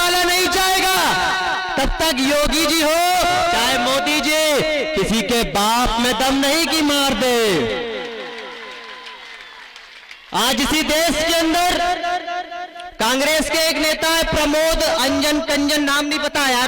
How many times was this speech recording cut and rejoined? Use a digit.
1